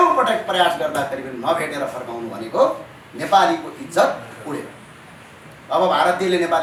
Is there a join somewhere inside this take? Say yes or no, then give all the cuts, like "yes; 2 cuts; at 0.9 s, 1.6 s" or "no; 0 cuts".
no; 0 cuts